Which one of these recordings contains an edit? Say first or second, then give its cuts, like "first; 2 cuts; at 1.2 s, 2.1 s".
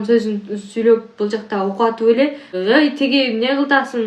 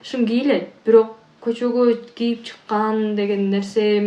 first; 1 cut; at 2.5 s